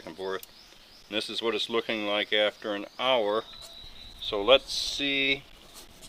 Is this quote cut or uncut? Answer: uncut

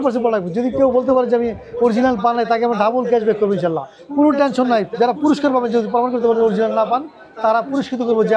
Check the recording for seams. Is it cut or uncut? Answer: uncut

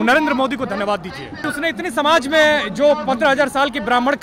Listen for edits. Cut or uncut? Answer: cut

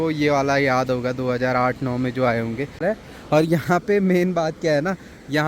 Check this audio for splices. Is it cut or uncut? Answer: cut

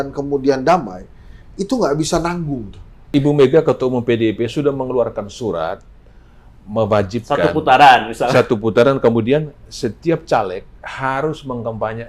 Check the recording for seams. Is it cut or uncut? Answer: cut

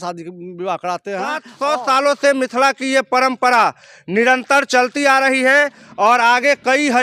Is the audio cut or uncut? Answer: cut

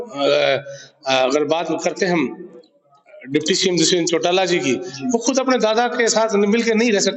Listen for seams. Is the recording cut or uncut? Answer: uncut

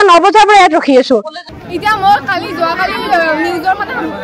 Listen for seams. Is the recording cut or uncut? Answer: cut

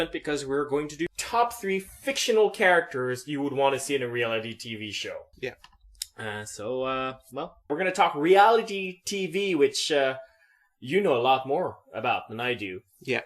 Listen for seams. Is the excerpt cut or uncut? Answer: uncut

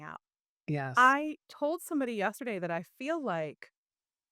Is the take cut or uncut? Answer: cut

